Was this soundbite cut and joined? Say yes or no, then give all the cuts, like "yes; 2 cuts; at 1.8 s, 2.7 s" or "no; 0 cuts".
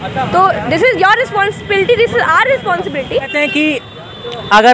yes; 1 cut; at 3.3 s